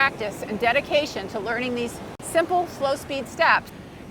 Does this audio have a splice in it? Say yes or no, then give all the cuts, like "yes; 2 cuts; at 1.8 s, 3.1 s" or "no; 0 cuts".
no; 0 cuts